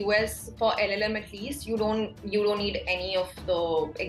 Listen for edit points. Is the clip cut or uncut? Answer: uncut